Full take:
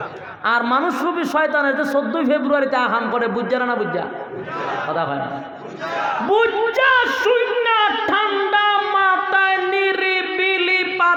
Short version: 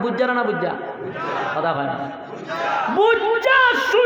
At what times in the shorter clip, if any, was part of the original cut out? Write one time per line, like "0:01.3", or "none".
none